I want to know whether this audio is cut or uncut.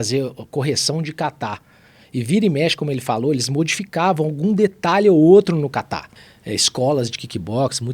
cut